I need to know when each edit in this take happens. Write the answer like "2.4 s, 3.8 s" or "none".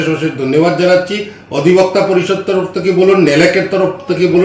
none